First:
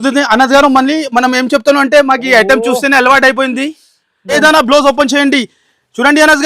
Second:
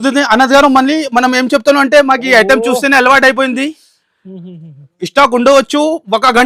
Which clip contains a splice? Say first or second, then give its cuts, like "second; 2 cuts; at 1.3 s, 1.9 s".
first; 1 cut; at 4.3 s